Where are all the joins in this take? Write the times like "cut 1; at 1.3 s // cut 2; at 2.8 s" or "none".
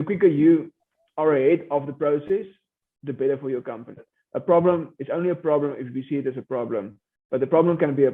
cut 1; at 4.1 s